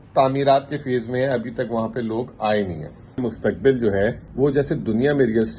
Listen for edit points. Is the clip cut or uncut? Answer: cut